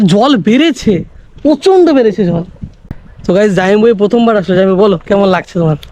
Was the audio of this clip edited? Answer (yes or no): yes